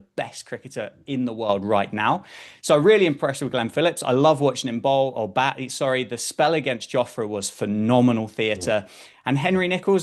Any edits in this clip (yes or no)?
no